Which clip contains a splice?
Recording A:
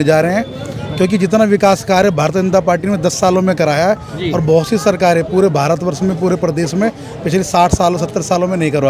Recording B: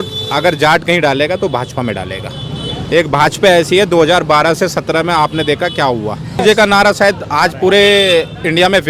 B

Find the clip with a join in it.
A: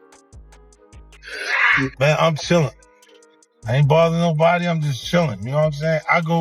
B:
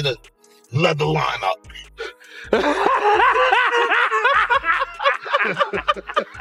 A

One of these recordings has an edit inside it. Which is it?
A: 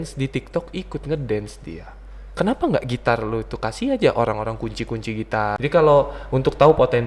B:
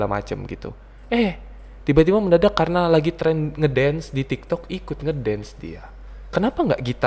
A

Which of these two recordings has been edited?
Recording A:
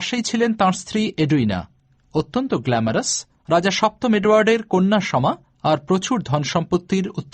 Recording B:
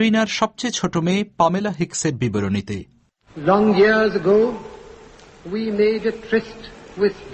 A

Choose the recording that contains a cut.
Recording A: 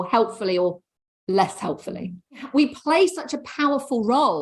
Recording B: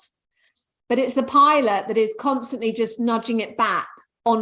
A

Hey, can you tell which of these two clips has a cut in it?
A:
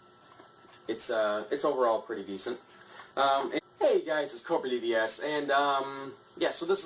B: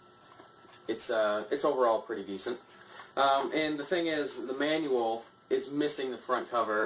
B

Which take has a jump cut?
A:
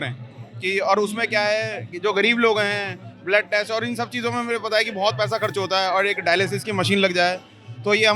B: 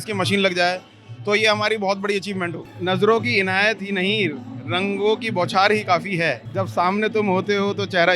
B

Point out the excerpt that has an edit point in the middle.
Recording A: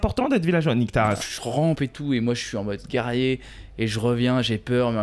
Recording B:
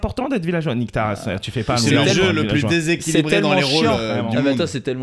A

